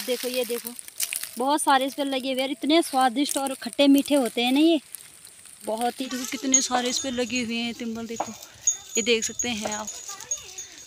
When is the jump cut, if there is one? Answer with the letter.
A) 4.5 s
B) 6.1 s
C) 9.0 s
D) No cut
B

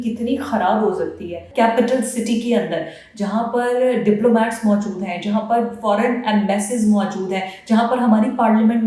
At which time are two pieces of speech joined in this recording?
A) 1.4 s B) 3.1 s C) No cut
A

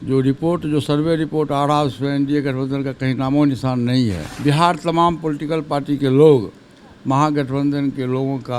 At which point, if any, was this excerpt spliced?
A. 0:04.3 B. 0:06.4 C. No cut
A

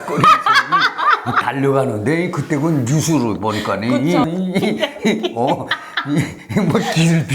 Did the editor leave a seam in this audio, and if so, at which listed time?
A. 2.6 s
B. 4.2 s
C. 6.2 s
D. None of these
B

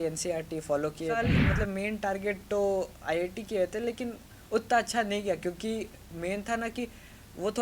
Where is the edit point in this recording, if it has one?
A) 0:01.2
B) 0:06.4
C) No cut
A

